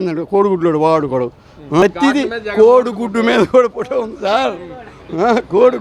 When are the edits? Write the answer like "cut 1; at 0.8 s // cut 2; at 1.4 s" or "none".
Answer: cut 1; at 1.8 s